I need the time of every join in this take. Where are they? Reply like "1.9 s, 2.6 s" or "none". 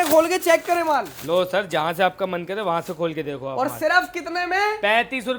none